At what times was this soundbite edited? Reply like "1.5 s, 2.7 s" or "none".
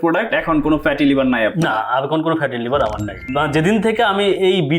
3.3 s